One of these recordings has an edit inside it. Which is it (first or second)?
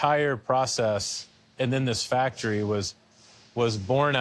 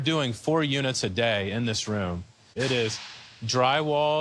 second